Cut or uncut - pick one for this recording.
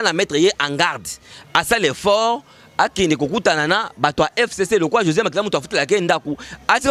uncut